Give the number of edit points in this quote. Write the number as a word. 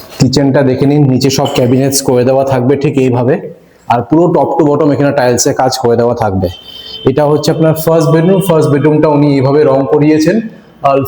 zero